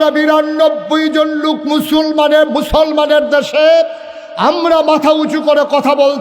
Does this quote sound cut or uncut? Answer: uncut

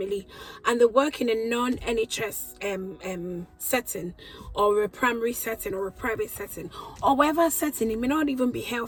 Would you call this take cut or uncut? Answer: uncut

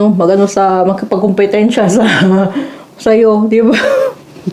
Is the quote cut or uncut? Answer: uncut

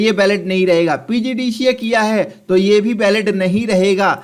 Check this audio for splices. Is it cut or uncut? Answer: uncut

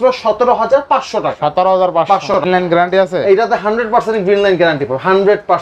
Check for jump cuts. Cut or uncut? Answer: cut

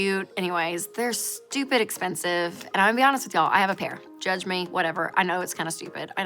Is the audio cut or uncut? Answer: cut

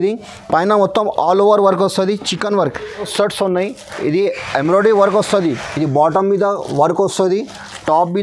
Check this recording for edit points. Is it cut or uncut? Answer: cut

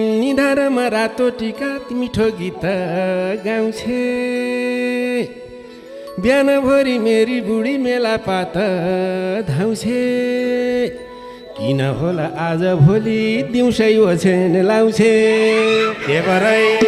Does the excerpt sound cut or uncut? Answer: uncut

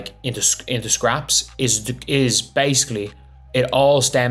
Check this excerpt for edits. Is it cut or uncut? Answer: uncut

